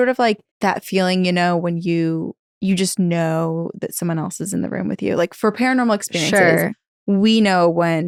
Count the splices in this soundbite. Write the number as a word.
zero